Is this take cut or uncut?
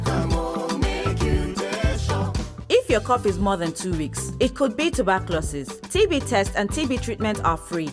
cut